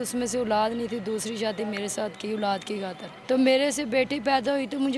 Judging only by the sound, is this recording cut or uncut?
cut